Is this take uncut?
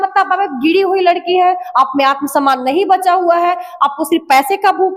yes; 0 cuts

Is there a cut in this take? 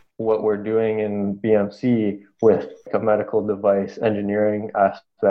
yes; 1 cut; at 2.9 s

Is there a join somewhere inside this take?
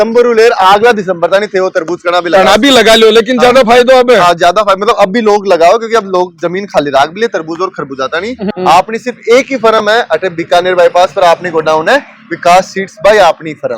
yes; 1 cut; at 8.4 s

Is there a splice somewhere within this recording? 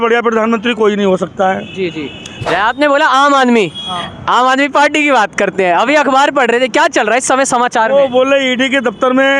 yes; 1 cut; at 2.4 s

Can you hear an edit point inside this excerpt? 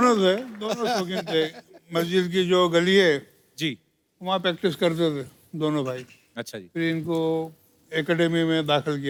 no; 0 cuts

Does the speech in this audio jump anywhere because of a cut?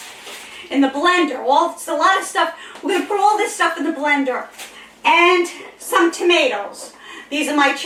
no; 0 cuts

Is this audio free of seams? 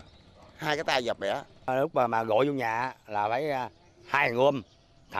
no; 1 cut; at 1.7 s

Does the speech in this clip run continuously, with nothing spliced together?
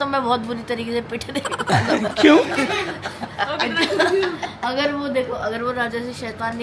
yes; 0 cuts

